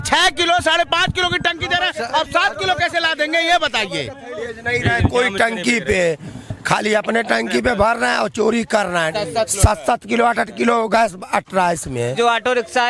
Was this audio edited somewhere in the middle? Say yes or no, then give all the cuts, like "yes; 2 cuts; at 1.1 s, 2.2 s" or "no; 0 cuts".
yes; 3 cuts; at 4.4 s, 9.1 s, 12.1 s